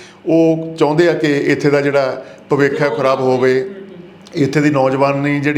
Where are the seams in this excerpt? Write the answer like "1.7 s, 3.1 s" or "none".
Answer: none